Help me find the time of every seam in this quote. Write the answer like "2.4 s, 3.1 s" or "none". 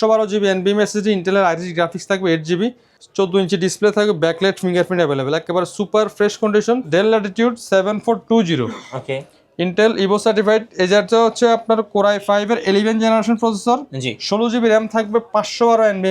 6.9 s